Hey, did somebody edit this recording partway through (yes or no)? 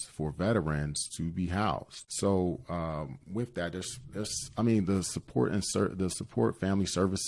yes